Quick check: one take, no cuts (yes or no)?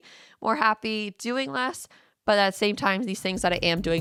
yes